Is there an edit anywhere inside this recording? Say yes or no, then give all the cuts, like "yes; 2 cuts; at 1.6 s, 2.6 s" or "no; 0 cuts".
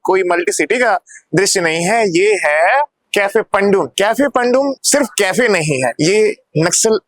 yes; 4 cuts; at 3.0 s, 3.9 s, 4.8 s, 5.9 s